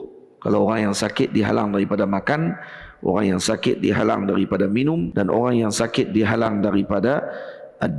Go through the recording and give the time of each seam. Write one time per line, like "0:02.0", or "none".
0:05.1